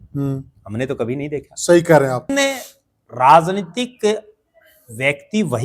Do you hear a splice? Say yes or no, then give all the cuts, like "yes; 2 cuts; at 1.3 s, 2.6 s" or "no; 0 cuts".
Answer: yes; 1 cut; at 2.3 s